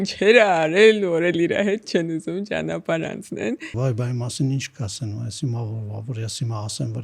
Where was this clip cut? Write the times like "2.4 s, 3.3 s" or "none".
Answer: 3.7 s